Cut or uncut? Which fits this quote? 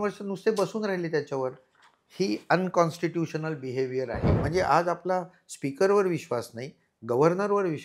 cut